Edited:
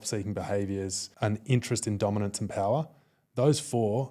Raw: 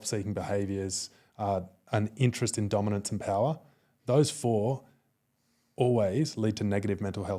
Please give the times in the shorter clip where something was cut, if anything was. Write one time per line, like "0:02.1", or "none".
0:01.0